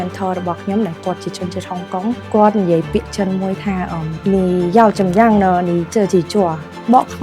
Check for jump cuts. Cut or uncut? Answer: cut